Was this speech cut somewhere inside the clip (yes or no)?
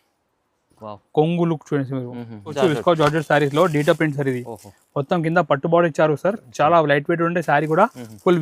yes